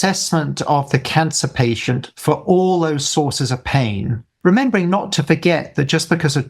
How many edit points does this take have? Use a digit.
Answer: 1